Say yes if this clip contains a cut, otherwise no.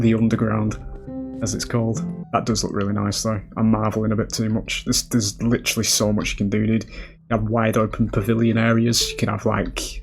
yes